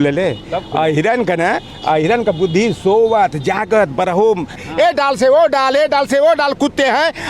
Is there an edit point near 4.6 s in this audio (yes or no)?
yes